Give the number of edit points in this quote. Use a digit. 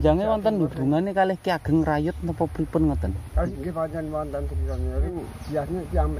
2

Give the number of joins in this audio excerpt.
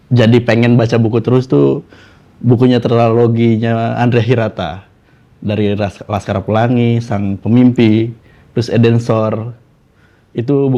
0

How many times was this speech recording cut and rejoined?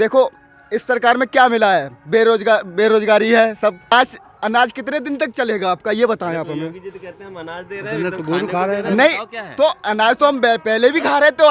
1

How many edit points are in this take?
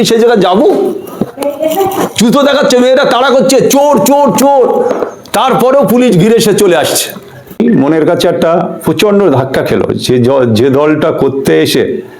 1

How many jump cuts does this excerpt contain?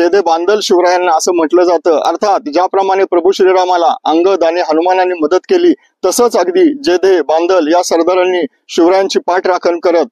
0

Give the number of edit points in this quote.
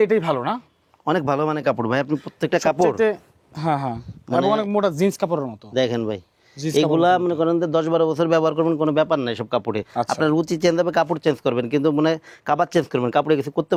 0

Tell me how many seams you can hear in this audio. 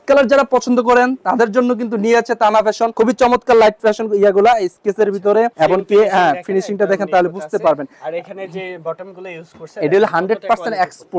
0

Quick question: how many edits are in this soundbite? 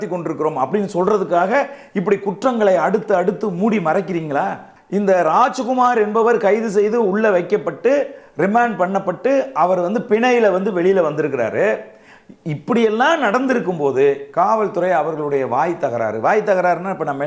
1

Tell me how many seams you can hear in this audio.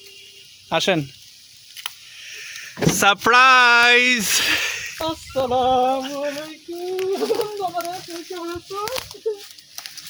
0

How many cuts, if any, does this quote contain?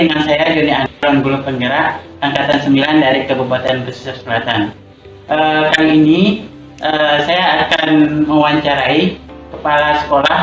1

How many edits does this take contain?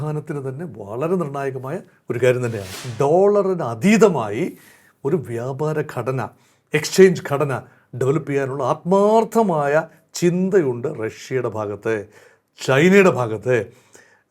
1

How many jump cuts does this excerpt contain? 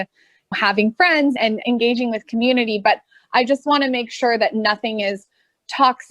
1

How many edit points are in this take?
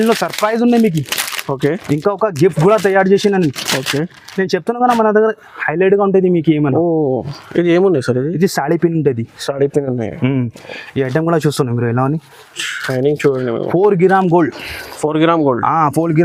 0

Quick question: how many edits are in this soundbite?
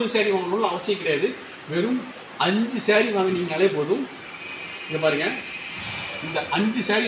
0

